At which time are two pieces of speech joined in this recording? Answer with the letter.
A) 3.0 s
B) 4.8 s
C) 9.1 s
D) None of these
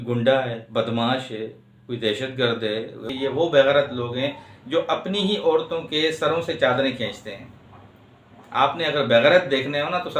A